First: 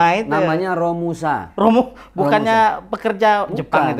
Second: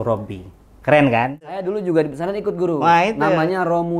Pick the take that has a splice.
second; 1 cut; at 1.6 s

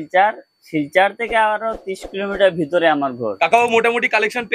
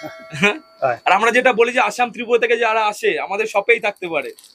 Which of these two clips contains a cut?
first; 1 cut; at 3.3 s

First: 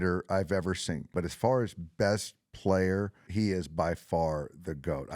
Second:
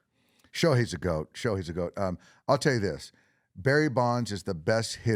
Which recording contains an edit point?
first; 2 cuts; at 1.1 s, 3.2 s

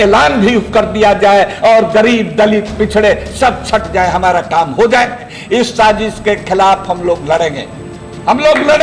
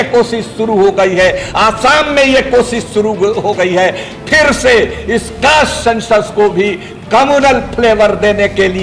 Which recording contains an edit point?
first; 1 cut; at 5.3 s

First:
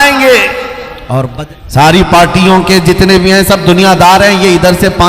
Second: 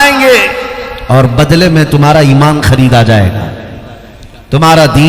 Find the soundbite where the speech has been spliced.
first; 1 cut; at 1.2 s

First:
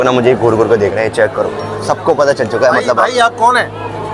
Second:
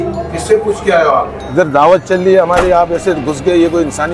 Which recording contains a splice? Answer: second; 1 cut; at 1.4 s

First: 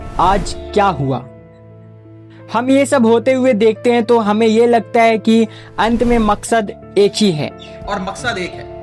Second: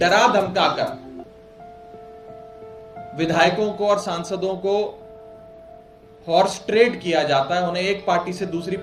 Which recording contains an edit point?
first; 1 cut; at 7.7 s

